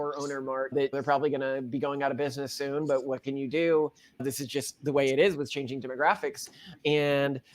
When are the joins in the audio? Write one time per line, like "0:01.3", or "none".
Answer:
none